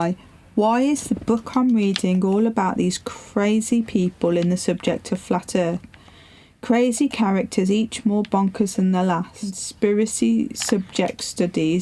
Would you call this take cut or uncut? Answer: cut